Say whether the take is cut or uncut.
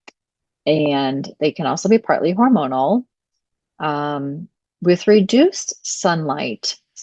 uncut